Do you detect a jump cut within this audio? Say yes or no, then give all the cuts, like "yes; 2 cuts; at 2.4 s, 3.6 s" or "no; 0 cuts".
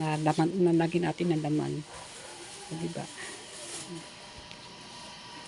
no; 0 cuts